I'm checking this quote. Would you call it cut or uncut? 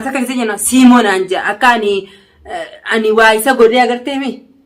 uncut